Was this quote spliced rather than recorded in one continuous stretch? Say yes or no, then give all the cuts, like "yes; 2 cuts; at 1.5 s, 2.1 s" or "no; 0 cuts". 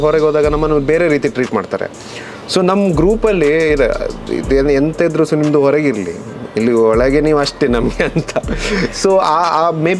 no; 0 cuts